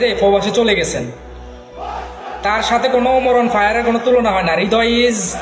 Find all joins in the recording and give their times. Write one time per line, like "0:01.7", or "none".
0:04.5